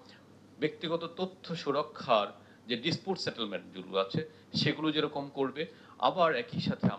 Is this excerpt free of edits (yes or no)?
yes